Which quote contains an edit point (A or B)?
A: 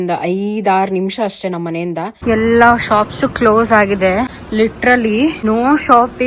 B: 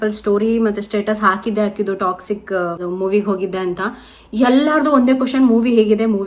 A